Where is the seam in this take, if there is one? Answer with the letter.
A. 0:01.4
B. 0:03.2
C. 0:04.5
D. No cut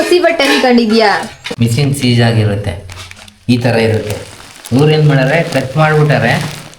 A